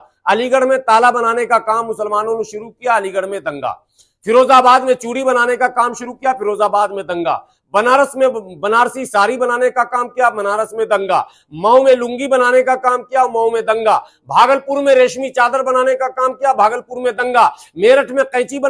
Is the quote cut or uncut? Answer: uncut